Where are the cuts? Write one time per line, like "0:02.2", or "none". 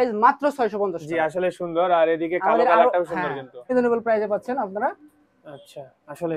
0:03.7